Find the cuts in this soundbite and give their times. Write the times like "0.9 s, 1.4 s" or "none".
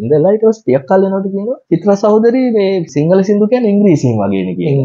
1.6 s, 2.9 s